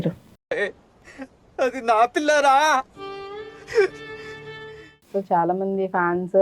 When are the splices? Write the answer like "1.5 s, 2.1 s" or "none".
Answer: 5.1 s